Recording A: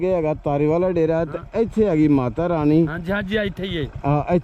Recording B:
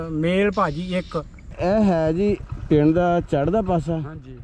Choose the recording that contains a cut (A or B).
B